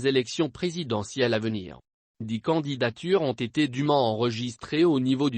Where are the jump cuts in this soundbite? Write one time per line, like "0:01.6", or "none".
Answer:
0:02.3